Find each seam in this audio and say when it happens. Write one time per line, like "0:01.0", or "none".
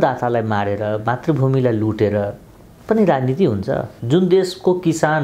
0:03.9

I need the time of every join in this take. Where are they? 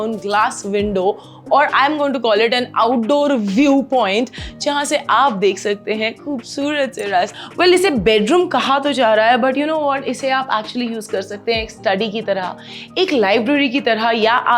0:07.3

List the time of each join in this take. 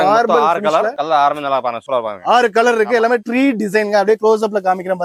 none

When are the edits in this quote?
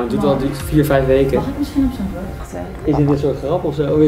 0:02.5

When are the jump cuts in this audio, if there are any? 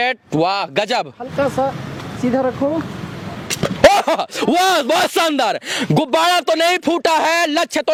none

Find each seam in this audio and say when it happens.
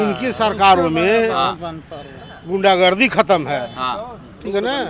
none

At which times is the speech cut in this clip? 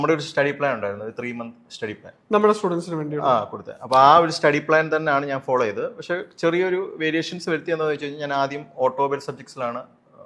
none

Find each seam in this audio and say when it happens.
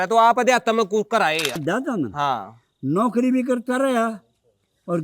0:01.6

